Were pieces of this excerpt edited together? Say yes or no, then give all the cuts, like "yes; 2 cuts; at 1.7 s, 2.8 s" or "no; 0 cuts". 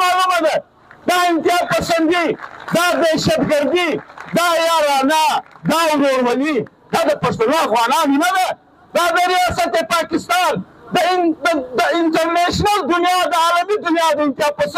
no; 0 cuts